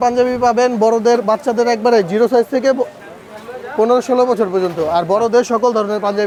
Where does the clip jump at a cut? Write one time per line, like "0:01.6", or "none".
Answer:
none